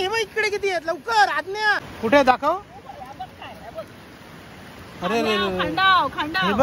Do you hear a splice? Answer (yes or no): yes